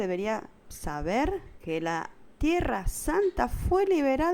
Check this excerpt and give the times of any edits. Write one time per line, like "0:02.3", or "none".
0:01.5